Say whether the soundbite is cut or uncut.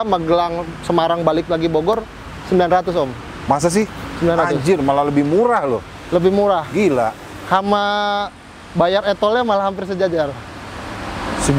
uncut